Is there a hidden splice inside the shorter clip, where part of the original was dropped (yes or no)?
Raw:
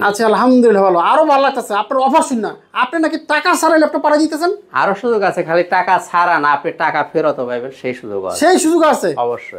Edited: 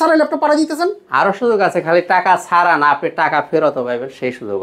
no